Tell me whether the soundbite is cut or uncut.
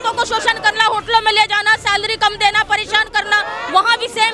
uncut